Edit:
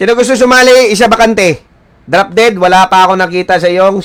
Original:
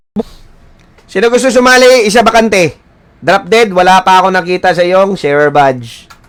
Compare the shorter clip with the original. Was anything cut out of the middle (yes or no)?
no